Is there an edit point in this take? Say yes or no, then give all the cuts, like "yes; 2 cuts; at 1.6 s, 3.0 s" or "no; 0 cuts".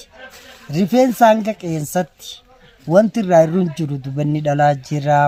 no; 0 cuts